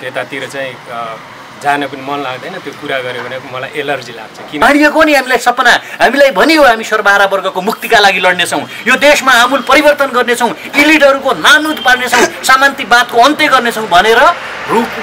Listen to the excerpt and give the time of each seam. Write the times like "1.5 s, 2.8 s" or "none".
4.6 s